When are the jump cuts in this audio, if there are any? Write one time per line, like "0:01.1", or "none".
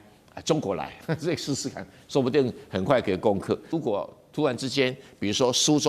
0:03.7